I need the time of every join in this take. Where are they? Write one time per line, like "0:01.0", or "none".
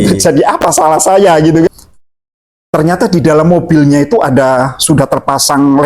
0:01.7